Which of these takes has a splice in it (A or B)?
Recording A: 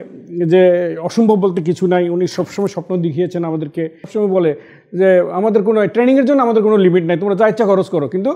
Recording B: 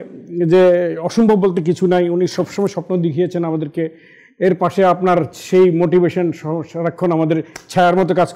A